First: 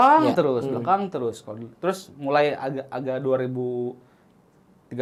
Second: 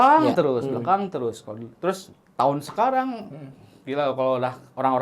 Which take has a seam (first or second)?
second